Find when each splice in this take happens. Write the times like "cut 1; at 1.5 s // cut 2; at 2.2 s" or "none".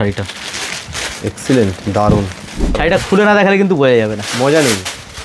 cut 1; at 2.8 s

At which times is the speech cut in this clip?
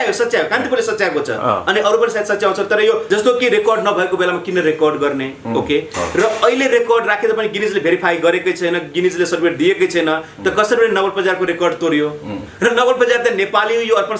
cut 1; at 3.0 s

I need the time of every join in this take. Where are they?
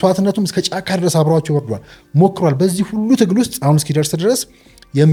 none

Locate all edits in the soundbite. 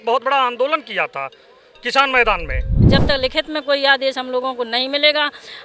cut 1; at 2.8 s

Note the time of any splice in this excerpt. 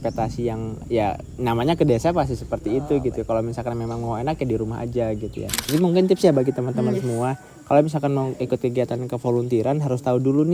cut 1; at 5.7 s

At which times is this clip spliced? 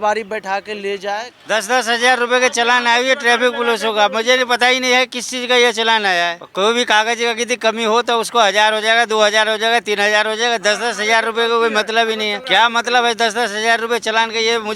cut 1; at 1.3 s // cut 2; at 6.4 s // cut 3; at 12.4 s

